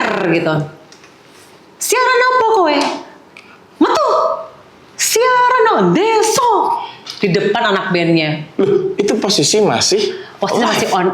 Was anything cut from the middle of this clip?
no; 0 cuts

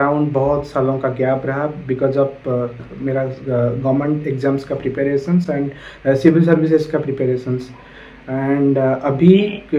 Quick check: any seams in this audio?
no; 0 cuts

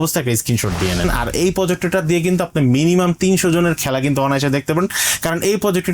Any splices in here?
yes; 1 cut; at 1.0 s

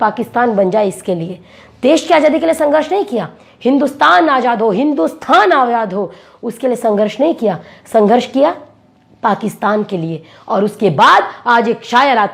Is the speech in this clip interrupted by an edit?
no; 0 cuts

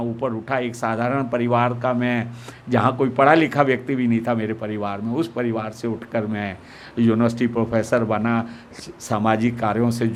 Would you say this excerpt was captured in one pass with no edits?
yes; 0 cuts

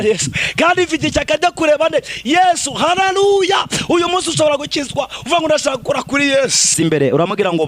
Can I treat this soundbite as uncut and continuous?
no; 1 cut; at 6.7 s

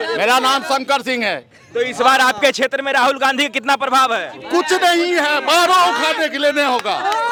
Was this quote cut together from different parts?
no; 0 cuts

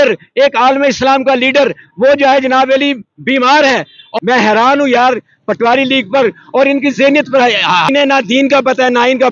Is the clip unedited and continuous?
no; 2 cuts; at 4.1 s, 7.9 s

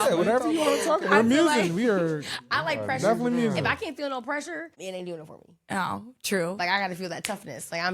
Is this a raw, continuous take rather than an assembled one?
no; 1 cut; at 4.7 s

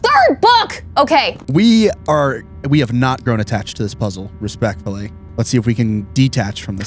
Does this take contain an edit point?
yes; 2 cuts; at 1.4 s, 5.2 s

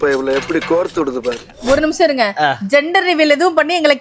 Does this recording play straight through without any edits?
no; 1 cut; at 1.5 s

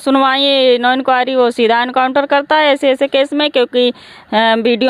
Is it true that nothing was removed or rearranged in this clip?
yes; 0 cuts

